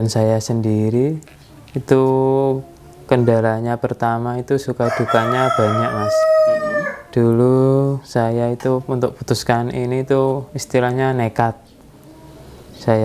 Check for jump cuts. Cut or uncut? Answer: uncut